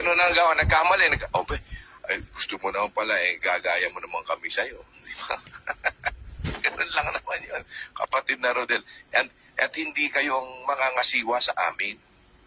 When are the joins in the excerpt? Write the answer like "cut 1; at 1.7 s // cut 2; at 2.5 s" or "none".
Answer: cut 1; at 6.4 s